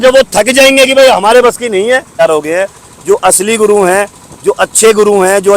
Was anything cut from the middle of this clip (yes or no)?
yes